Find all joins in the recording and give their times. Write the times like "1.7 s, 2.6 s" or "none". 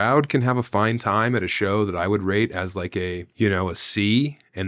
3.2 s